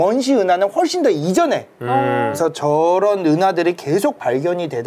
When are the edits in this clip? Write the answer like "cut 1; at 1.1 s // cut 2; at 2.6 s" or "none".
cut 1; at 2.3 s